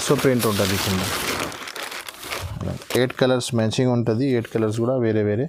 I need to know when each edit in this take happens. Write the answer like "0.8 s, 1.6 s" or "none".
none